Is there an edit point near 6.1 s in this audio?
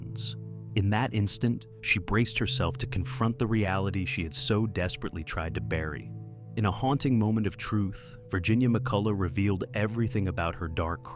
yes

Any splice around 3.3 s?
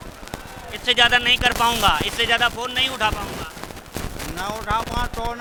no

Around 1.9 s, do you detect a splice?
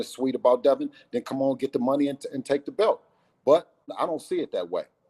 no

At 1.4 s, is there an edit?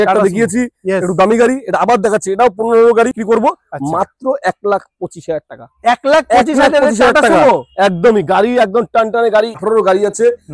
no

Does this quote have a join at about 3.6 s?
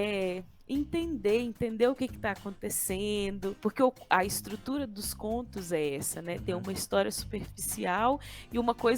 yes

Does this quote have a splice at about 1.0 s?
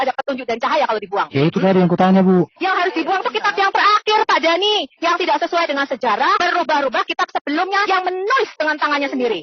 no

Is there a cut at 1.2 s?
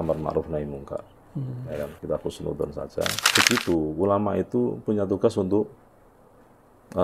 no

